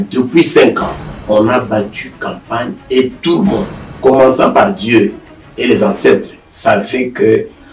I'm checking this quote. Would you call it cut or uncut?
cut